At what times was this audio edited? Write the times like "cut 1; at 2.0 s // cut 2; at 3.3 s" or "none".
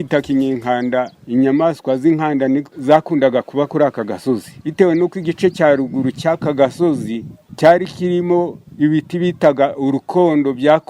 cut 1; at 1.2 s // cut 2; at 2.7 s // cut 3; at 4.6 s